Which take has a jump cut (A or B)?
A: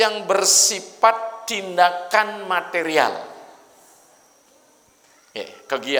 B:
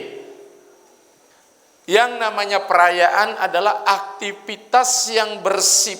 B